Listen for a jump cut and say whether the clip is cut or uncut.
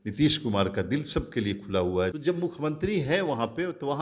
cut